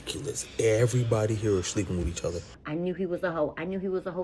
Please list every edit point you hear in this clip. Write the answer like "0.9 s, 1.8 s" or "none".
2.5 s